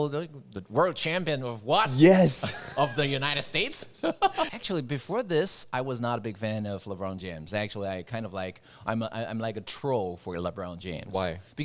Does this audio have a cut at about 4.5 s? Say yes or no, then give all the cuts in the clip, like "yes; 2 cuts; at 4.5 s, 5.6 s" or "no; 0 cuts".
yes; 1 cut; at 4.5 s